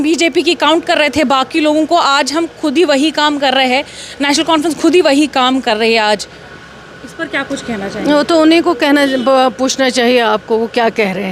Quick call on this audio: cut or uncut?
uncut